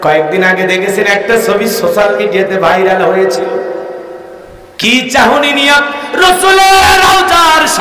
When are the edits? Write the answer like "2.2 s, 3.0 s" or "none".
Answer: none